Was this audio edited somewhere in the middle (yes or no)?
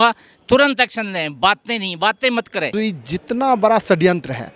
yes